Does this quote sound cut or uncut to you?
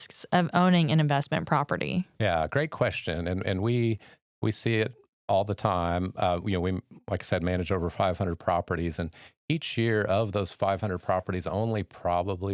uncut